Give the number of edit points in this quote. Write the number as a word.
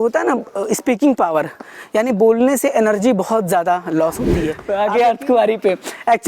one